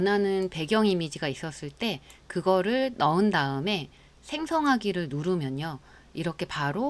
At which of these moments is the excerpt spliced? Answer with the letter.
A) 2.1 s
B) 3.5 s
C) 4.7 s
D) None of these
D